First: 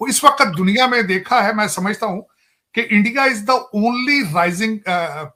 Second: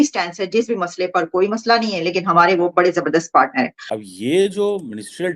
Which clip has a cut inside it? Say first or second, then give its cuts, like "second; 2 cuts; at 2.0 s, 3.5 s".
second; 1 cut; at 3.8 s